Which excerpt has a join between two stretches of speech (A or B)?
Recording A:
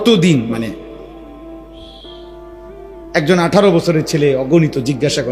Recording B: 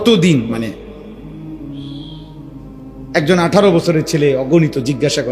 B